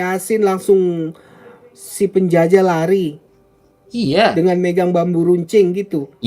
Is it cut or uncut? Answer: uncut